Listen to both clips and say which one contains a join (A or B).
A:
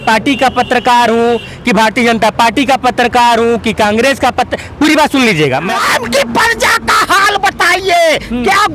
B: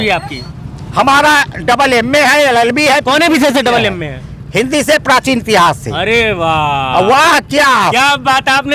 A